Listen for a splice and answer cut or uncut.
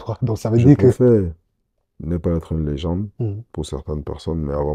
cut